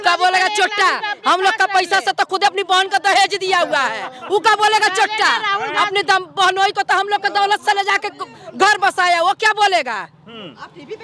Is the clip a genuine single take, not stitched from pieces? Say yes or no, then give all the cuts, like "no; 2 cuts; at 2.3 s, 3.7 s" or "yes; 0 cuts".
yes; 0 cuts